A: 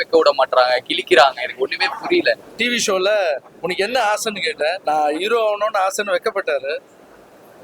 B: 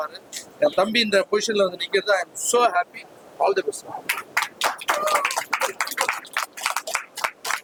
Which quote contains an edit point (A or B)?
A